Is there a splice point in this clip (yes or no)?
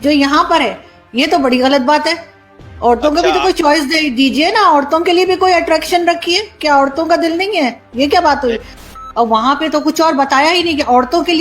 yes